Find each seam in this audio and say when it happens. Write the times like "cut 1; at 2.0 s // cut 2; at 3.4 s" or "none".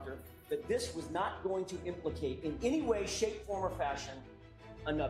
none